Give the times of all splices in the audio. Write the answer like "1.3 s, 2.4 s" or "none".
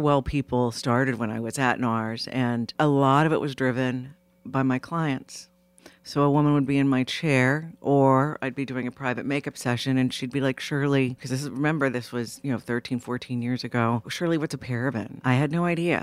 2.7 s, 11.2 s, 14.1 s, 15.1 s